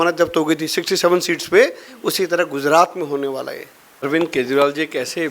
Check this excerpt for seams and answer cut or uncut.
cut